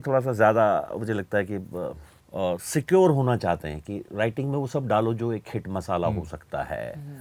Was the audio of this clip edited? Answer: no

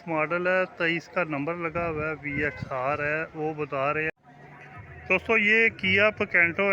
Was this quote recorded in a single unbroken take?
no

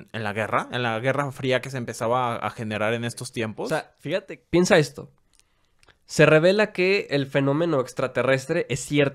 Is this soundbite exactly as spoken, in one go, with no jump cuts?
no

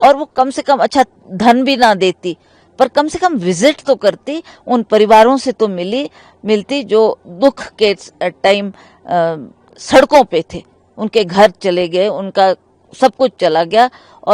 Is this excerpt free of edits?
yes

